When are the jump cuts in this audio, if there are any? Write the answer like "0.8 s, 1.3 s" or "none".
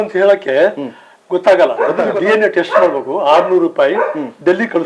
2.1 s